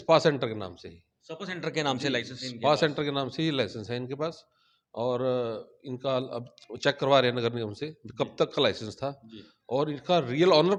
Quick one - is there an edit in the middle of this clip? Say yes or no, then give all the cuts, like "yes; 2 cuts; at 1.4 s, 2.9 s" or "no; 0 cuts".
no; 0 cuts